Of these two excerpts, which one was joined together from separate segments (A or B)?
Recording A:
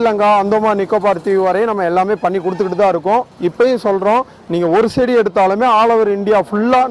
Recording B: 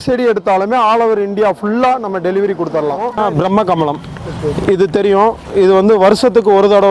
B